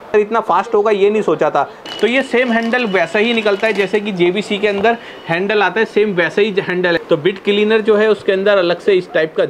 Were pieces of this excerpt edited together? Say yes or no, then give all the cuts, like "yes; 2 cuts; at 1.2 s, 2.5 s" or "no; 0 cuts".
yes; 2 cuts; at 1.8 s, 7.0 s